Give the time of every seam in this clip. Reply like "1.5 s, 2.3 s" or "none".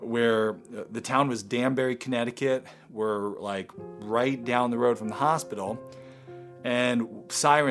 none